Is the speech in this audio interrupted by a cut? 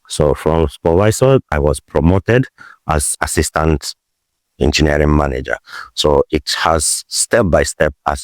yes; 2 cuts; at 1.5 s, 3.1 s

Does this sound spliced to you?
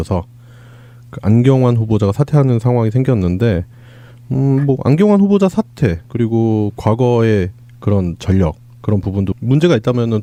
no; 0 cuts

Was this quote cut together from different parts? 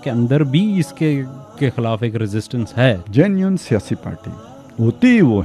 yes; 1 cut; at 3.0 s

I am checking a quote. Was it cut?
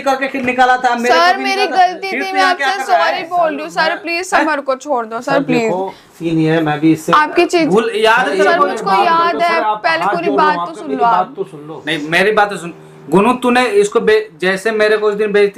no; 0 cuts

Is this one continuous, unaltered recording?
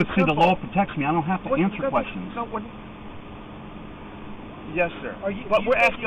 yes; 0 cuts

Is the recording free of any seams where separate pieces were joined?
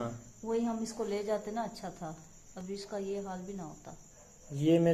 yes; 0 cuts

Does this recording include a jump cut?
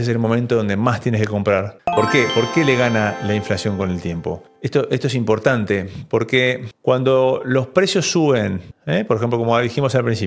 yes; 1 cut; at 1.8 s

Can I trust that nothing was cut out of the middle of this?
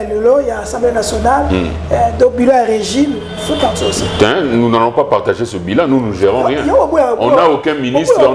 yes; 0 cuts

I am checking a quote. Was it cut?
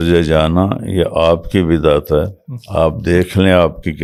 no; 0 cuts

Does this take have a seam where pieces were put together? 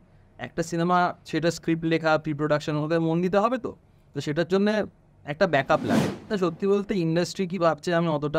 yes; 1 cut; at 6.1 s

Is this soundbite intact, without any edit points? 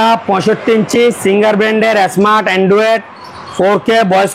yes; 0 cuts

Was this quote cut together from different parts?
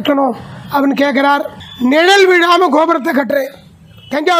yes; 1 cut; at 1.6 s

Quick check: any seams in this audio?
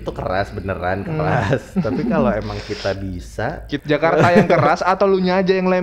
yes; 1 cut; at 3.7 s

